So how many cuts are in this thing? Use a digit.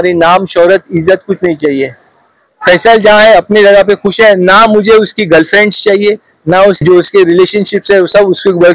1